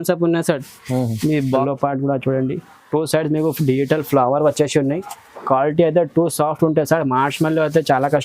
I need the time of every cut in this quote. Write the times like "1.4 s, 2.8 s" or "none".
1.6 s